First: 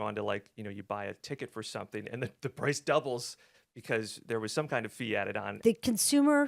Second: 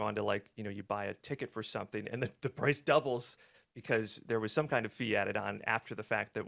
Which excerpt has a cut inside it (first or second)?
first